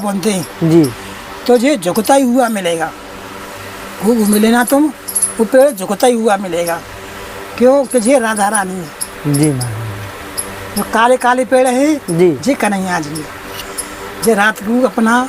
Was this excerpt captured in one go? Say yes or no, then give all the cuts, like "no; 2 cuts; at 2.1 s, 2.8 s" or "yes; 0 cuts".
yes; 0 cuts